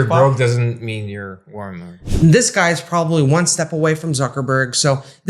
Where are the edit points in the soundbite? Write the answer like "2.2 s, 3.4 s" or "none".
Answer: 2.0 s